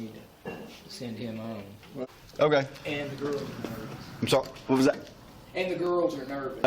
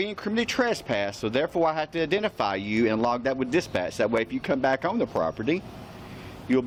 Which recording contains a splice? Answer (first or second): first